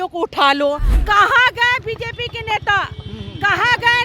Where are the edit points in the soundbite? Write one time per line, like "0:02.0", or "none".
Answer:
0:00.9